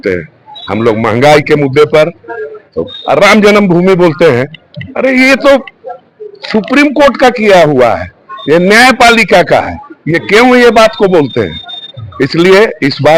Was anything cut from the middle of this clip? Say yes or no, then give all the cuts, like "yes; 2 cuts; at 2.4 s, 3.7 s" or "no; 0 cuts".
no; 0 cuts